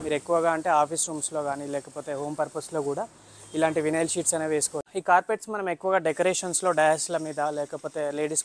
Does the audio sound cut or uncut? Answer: cut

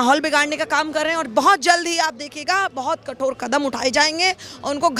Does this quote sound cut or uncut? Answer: uncut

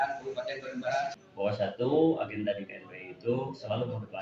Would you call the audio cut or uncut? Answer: cut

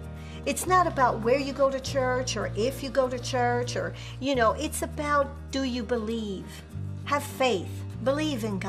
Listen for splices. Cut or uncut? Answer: uncut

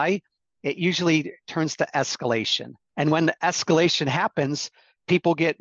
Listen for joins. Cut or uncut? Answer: uncut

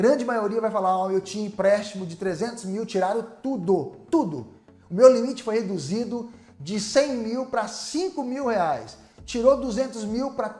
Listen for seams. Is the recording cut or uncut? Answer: uncut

